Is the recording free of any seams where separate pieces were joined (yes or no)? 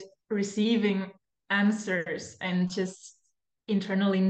yes